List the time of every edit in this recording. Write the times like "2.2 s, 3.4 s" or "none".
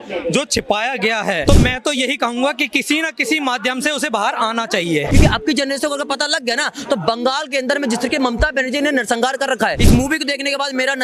1.4 s, 5.1 s, 9.8 s